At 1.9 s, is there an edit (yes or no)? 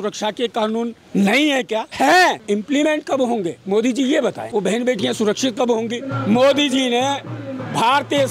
yes